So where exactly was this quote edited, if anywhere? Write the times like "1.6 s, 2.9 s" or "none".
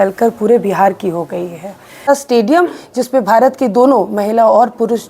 2.1 s